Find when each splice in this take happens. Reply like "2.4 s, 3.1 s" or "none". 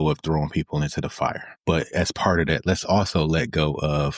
1.5 s